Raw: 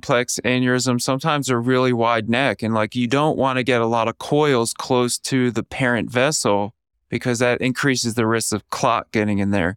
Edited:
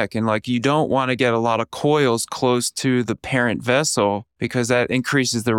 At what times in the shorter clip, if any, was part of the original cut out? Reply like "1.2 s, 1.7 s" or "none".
4.3 s